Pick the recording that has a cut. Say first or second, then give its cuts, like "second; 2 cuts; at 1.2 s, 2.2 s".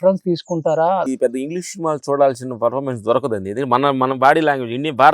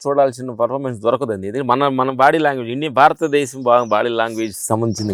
first; 1 cut; at 1.1 s